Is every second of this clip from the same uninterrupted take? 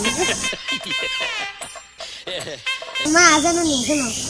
no; 1 cut; at 3.1 s

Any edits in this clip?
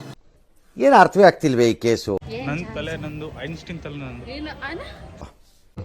no; 0 cuts

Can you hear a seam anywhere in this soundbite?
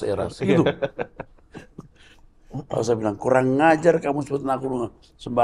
no; 0 cuts

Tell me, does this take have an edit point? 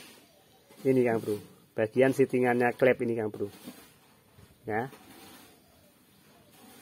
no; 0 cuts

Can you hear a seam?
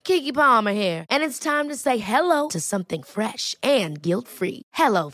no; 0 cuts

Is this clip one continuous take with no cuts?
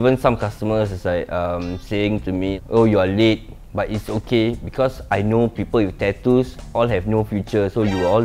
yes; 0 cuts

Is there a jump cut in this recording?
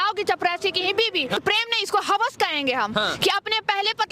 yes; 1 cut; at 1.4 s

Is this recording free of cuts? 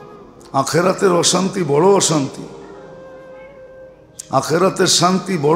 no; 2 cuts; at 2.8 s, 4.0 s

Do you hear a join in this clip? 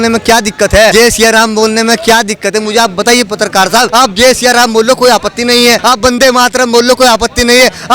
yes; 3 cuts; at 0.9 s, 3.9 s, 5.8 s

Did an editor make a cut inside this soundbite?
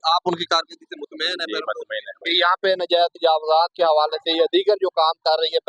yes; 1 cut; at 2.2 s

